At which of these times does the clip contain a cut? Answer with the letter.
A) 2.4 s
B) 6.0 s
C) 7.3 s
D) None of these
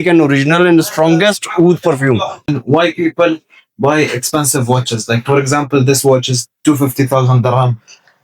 A